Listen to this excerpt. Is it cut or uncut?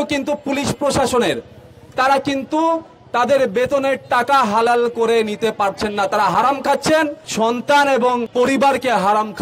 cut